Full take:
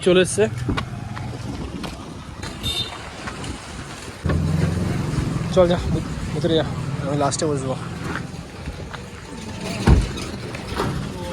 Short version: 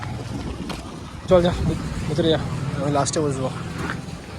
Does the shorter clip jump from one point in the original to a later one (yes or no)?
yes